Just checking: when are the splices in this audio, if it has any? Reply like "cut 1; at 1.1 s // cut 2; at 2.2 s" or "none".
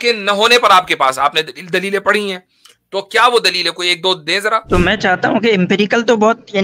cut 1; at 4.6 s

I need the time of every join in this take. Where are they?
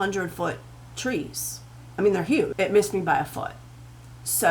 cut 1; at 2.5 s

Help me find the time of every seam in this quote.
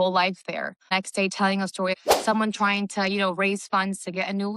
cut 1; at 0.9 s // cut 2; at 2.0 s

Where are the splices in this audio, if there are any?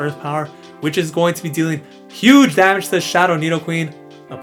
none

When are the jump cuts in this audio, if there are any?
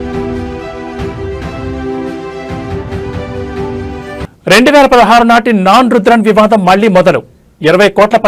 cut 1; at 4.2 s

